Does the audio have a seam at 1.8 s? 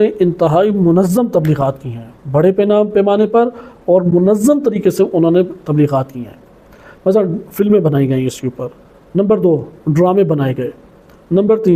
no; 0 cuts

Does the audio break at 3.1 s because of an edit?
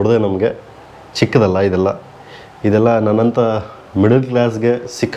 no; 0 cuts

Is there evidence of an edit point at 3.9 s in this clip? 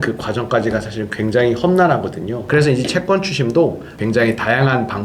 yes; 2 cuts; at 2.3 s, 3.9 s

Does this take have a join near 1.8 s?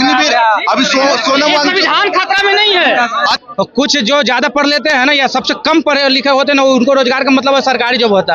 no; 1 cut; at 3.4 s

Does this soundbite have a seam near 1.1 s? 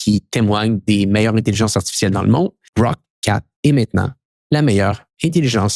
no; 1 cut; at 2.6 s

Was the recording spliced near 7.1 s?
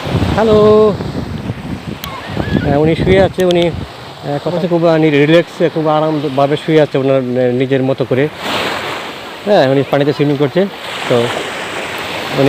no; 2 cuts; at 4.6 s, 8.5 s

